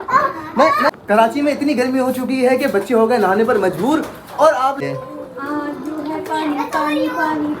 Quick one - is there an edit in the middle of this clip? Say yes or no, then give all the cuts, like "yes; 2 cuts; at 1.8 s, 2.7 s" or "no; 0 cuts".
yes; 2 cuts; at 0.9 s, 4.8 s